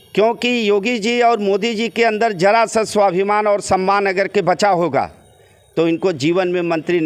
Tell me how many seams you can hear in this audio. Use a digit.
0